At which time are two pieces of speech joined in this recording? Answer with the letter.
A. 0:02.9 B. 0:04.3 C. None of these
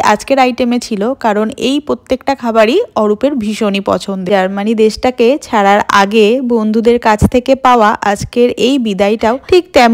B